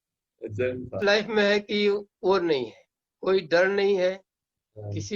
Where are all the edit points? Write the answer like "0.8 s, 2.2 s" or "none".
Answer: 1.0 s